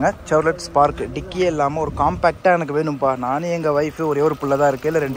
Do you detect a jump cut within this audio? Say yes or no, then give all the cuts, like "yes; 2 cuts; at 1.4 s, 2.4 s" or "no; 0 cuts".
no; 0 cuts